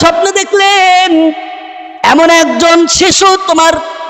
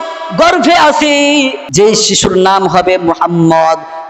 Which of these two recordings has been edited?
second; 1 cut; at 1.6 s

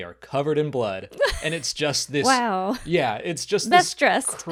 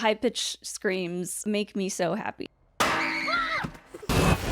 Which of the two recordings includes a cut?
second; 2 cuts; at 1.3 s, 2.4 s

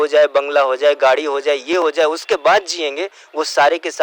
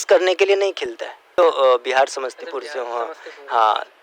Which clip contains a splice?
second; 1 cut; at 1.3 s

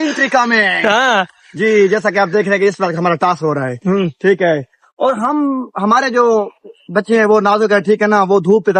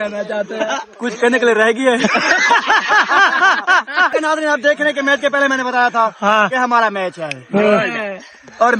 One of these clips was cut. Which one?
second; 1 cut; at 4.1 s

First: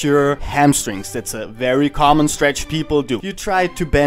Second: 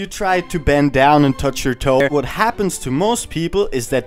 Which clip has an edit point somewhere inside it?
second; 1 cut; at 2.0 s

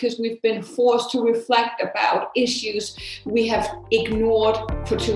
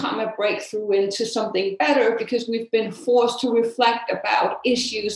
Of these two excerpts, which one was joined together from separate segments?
first; 1 cut; at 3.8 s

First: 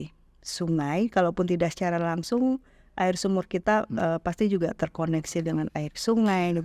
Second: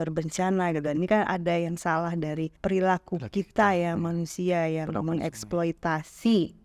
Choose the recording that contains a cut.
second; 1 cut; at 2.6 s

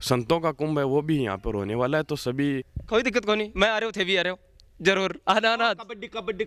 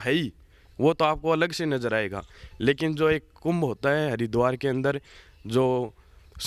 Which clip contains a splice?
first; 1 cut; at 2.6 s

